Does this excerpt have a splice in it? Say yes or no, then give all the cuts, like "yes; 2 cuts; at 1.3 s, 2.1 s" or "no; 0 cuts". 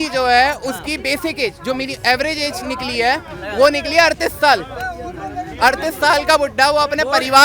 no; 0 cuts